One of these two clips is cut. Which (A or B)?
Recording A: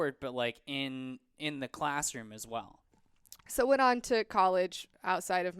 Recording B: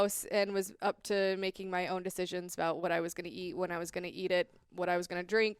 A